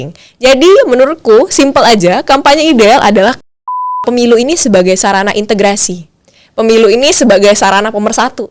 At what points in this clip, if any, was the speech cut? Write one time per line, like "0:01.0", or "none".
0:04.0

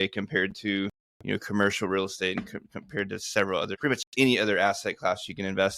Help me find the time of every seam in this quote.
0:03.7

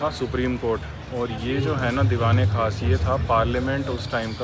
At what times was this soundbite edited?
none

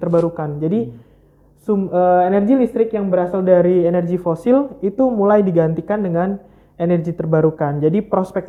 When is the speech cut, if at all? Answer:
none

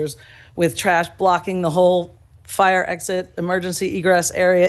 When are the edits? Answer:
none

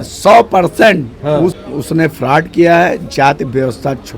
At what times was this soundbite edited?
0:01.6

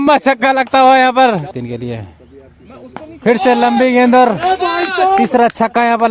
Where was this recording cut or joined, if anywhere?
0:01.4

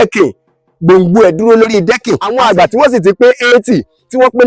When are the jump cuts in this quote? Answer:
0:02.3

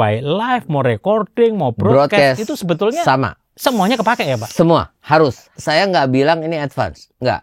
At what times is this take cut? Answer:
0:05.5

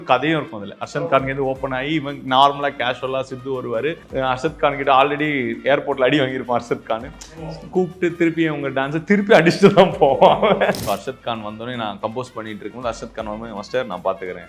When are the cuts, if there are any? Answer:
0:04.0
0:10.8

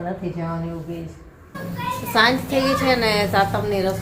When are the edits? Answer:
0:01.6

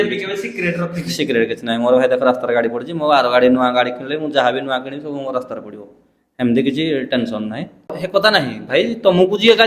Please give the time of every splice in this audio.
0:08.0

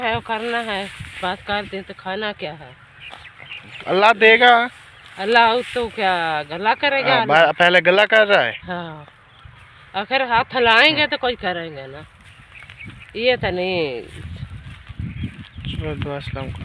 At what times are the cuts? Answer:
none

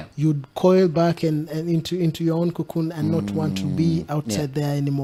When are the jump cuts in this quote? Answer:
none

